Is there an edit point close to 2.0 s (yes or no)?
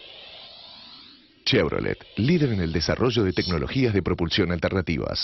no